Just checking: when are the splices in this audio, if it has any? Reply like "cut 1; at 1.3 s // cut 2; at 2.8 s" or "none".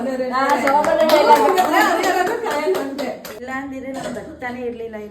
cut 1; at 3.4 s